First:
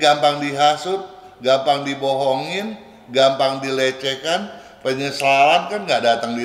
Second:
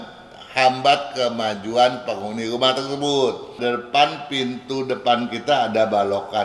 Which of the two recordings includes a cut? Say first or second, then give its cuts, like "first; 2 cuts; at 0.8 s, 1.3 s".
second; 1 cut; at 3.5 s